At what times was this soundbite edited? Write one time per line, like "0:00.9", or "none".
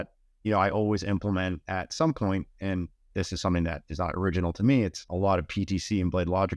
0:05.0